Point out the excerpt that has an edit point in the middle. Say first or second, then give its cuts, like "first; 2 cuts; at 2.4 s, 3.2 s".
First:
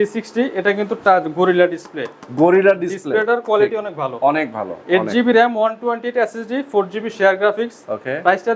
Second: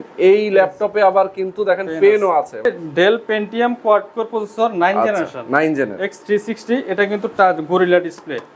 second; 1 cut; at 2.7 s